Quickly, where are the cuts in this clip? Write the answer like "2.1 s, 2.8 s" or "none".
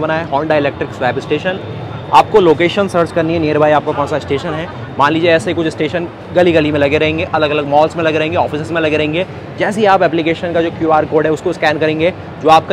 none